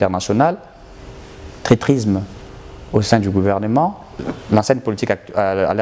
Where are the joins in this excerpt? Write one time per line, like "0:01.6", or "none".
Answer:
0:04.2